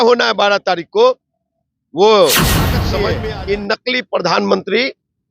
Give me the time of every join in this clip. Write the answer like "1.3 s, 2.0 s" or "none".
2.8 s